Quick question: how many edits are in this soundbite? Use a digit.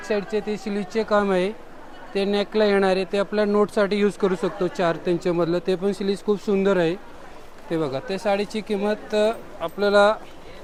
0